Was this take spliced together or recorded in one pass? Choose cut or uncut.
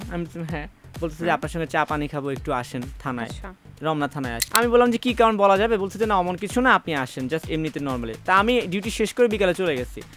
cut